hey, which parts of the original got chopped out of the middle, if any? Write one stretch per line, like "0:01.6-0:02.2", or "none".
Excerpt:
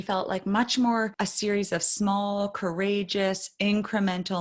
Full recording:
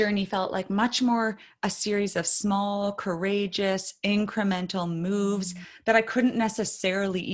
0:01.4-0:01.6

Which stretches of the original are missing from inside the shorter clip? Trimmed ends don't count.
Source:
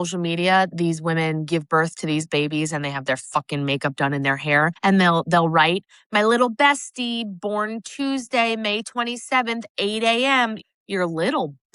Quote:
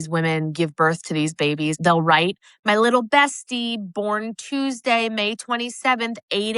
0:02.7-0:05.3

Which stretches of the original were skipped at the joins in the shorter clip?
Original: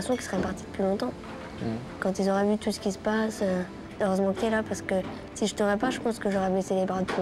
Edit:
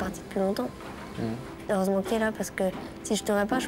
0:01.9-0:03.8

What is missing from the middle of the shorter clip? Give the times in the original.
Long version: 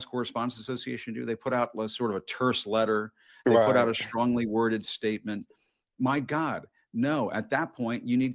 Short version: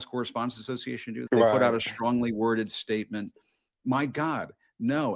0:01.1-0:03.3

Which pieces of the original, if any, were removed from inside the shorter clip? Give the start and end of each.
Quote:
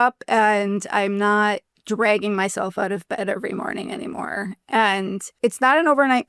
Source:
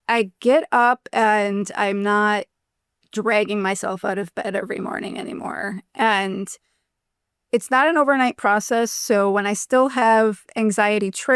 0:02.6-0:03.0
0:06.5-0:07.4

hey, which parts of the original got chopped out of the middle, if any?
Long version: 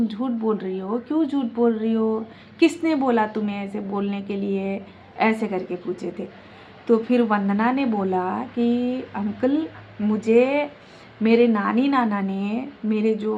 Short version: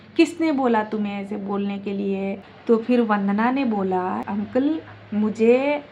0:04.9-0:06.7
0:08.5-0:09.1

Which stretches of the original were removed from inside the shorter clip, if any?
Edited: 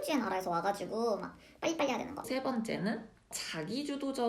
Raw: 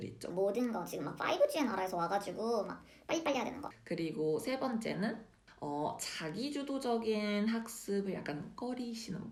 0:03.7-0:04.4
0:05.6-0:06.1

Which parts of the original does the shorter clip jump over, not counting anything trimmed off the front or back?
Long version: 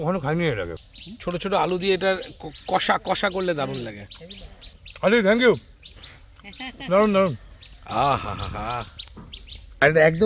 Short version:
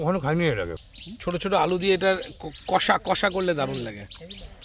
none

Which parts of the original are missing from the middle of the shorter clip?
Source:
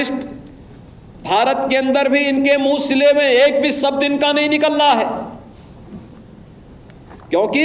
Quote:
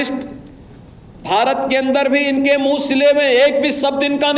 none

